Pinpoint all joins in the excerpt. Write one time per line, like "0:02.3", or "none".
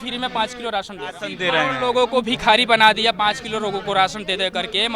0:01.3